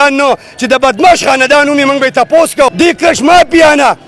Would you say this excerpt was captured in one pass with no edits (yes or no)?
no